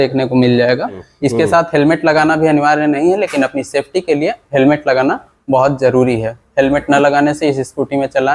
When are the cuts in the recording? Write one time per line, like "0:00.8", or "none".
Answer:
0:01.1